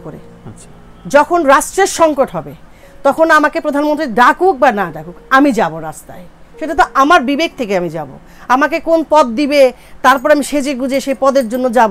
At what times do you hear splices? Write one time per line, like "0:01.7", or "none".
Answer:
none